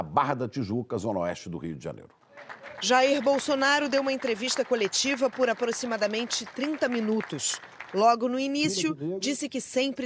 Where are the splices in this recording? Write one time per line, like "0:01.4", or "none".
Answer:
0:01.2